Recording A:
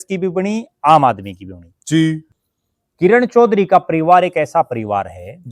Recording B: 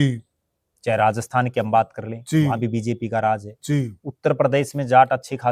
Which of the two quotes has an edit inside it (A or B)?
A